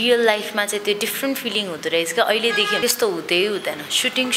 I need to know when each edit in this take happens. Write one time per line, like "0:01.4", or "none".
0:02.8